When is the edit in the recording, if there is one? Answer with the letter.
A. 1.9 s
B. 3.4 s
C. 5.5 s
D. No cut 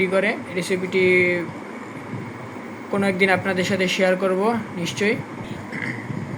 C